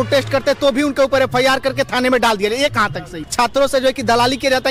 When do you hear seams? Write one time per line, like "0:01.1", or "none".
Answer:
0:03.2